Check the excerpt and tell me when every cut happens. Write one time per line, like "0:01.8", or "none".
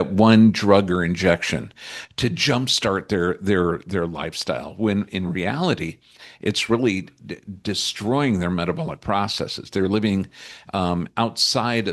none